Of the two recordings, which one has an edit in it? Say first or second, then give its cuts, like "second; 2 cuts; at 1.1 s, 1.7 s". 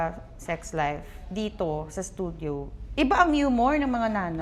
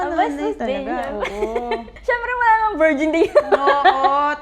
second; 1 cut; at 1.9 s